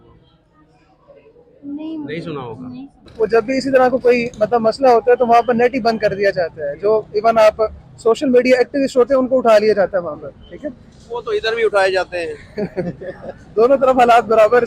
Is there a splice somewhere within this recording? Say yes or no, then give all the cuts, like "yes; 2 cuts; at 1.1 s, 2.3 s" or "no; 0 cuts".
yes; 1 cut; at 3.1 s